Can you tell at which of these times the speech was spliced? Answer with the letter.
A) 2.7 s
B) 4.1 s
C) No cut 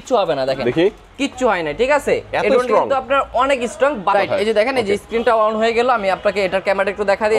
B